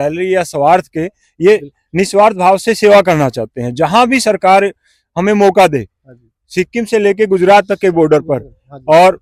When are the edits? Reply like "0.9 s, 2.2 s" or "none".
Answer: none